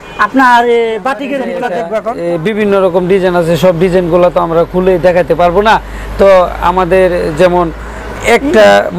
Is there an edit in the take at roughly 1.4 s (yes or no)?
yes